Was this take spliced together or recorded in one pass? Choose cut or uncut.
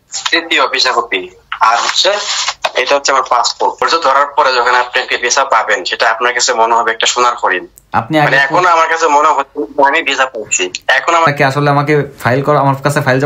cut